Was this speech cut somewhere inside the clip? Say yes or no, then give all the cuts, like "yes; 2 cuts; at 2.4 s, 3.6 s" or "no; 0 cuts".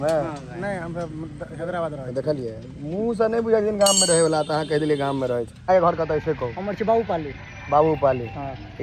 yes; 1 cut; at 5.5 s